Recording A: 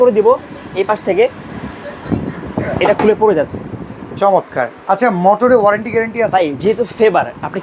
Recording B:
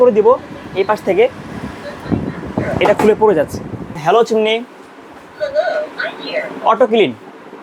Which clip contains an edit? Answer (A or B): B